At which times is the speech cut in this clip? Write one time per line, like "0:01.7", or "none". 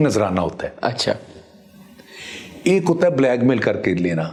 none